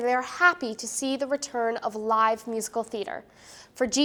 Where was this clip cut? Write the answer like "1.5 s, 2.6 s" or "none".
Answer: none